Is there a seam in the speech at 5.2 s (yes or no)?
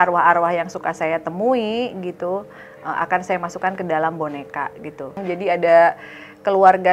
yes